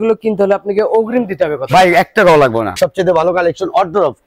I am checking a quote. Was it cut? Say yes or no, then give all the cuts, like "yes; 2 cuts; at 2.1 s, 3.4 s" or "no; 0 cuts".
yes; 1 cut; at 2.7 s